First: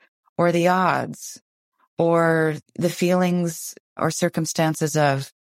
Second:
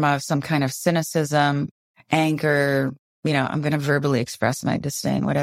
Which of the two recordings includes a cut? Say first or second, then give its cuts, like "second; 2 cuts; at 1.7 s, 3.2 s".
first; 2 cuts; at 2.7 s, 4.0 s